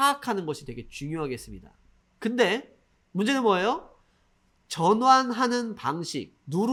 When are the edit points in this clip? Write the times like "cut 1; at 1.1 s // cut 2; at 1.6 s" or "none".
none